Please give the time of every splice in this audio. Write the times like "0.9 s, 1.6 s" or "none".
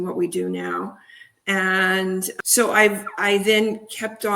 2.3 s